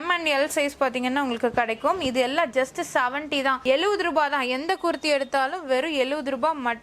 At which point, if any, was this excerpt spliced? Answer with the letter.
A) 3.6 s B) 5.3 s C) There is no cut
A